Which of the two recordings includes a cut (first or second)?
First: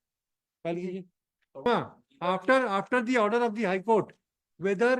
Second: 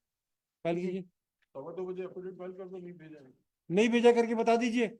first